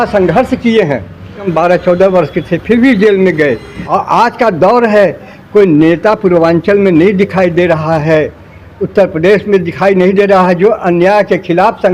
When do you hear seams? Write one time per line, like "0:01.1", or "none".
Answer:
0:01.5
0:03.7